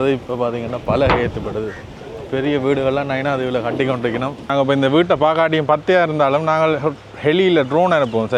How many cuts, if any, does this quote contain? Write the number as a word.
one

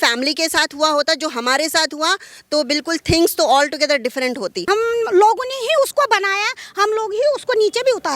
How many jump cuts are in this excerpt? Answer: one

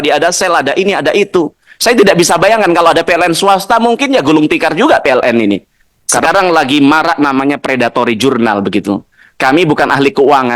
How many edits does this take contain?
one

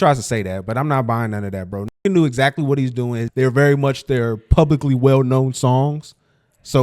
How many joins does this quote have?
one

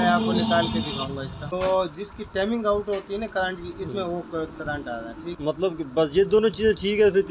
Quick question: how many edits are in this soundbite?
two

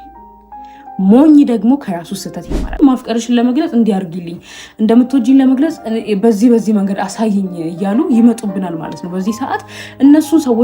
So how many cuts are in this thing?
one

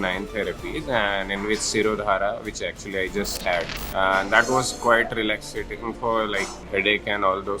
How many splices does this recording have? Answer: two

